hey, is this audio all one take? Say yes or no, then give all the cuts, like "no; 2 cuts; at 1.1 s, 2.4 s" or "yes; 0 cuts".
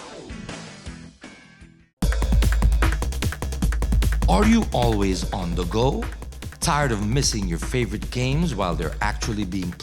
no; 1 cut; at 1.9 s